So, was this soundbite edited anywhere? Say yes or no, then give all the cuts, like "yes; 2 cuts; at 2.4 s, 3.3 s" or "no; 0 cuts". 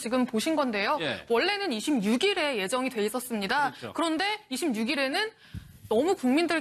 no; 0 cuts